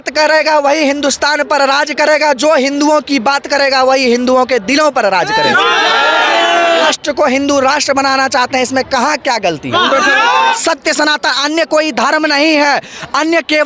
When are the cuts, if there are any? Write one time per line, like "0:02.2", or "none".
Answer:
0:06.9
0:10.6